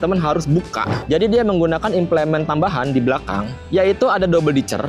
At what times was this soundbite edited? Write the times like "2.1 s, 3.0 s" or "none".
1.0 s